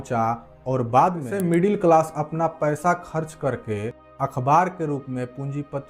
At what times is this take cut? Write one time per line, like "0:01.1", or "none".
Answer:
0:01.3

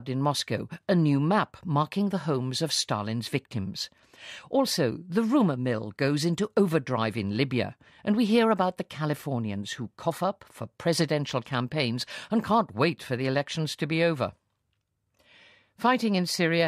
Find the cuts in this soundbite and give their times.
0:05.6

